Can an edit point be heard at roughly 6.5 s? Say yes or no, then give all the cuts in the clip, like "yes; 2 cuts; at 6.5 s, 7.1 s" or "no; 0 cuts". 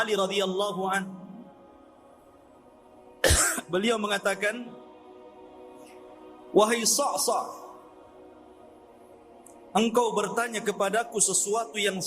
yes; 6 cuts; at 1.8 s, 3.2 s, 5.1 s, 6.5 s, 7.8 s, 9.7 s